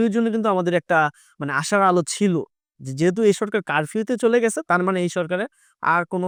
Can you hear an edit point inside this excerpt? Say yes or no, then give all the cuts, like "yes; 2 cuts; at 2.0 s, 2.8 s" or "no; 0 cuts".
no; 0 cuts